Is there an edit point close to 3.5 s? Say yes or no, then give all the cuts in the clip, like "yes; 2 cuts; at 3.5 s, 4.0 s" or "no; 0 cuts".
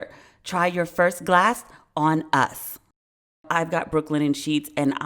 yes; 1 cut; at 3.5 s